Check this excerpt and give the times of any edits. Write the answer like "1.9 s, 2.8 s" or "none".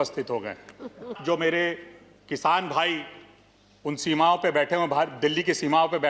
1.2 s

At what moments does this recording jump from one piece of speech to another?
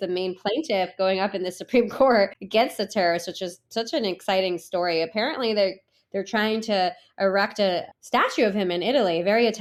none

